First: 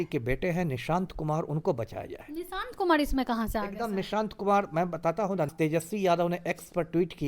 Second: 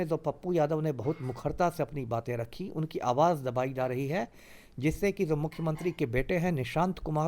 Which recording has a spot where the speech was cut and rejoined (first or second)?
first